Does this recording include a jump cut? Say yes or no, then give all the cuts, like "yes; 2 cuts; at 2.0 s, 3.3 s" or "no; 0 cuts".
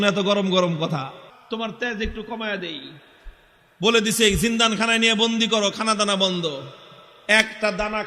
yes; 1 cut; at 1.3 s